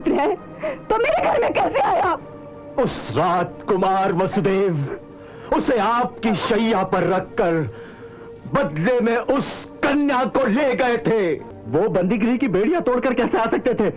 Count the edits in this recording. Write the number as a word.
zero